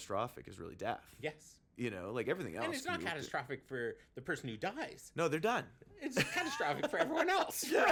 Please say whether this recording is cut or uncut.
uncut